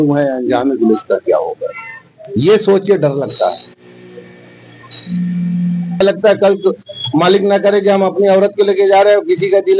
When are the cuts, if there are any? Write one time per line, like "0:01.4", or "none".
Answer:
0:06.0